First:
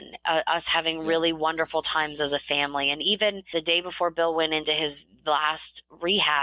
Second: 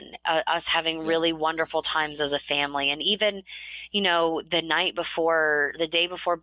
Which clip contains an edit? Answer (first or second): first